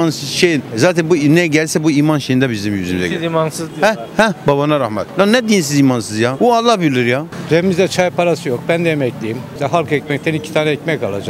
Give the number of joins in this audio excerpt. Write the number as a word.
two